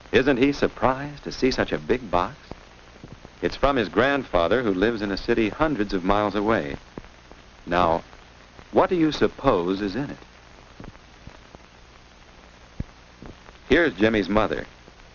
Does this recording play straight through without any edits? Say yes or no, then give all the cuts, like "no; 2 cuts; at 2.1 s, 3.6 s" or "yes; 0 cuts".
yes; 0 cuts